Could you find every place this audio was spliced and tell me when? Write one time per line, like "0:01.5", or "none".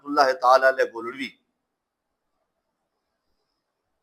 none

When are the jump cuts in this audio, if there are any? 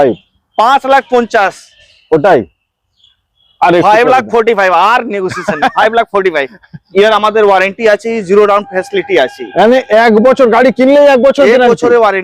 0:06.8

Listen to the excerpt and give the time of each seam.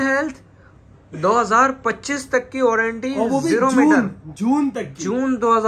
none

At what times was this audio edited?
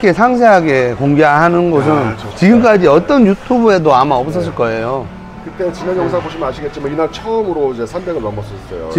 none

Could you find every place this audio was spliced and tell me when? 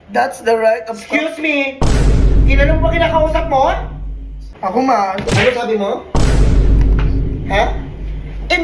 0:04.5

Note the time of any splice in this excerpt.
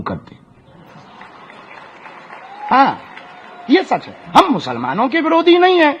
none

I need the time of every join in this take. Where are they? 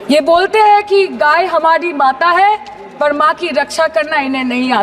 none

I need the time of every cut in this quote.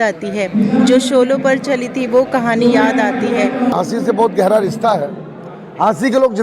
0:03.7

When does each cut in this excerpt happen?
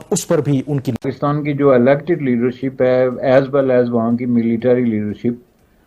0:01.0

